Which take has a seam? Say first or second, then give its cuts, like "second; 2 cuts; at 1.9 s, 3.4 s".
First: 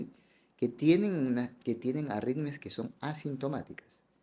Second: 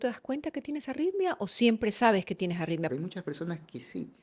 second; 1 cut; at 2.9 s